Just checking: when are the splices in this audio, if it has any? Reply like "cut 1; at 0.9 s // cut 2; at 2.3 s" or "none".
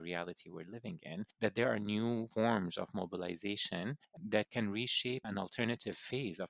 cut 1; at 1.3 s // cut 2; at 2.3 s // cut 3; at 4.1 s